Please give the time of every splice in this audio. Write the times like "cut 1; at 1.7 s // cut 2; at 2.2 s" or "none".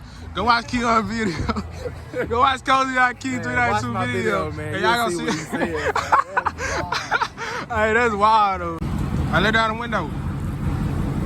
cut 1; at 8.8 s